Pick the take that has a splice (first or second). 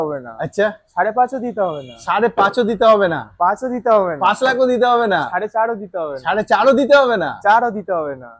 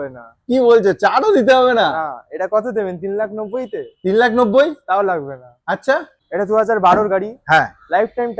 second